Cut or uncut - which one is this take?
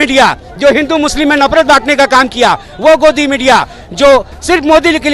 uncut